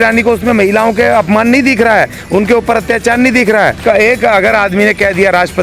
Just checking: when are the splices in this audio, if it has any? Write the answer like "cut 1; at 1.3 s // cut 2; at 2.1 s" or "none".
cut 1; at 3.8 s